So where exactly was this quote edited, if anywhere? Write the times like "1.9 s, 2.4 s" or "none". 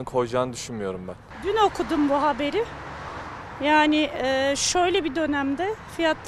none